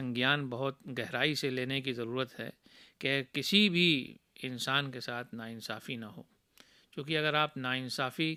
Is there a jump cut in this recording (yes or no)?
no